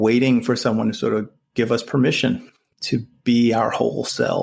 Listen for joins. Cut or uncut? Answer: uncut